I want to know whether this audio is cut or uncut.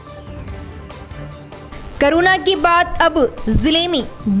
cut